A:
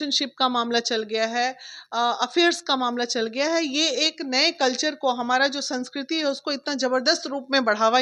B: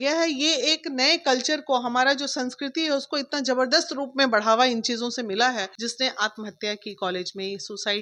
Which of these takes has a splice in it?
B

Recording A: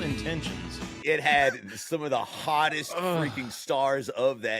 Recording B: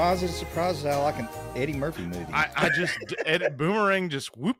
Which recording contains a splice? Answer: A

